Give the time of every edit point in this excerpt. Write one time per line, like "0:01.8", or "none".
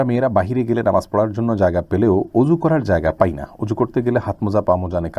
none